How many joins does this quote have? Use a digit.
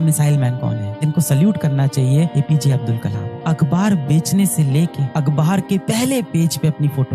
1